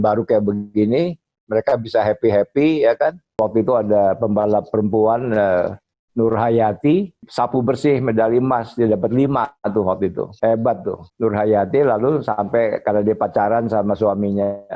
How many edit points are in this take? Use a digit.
4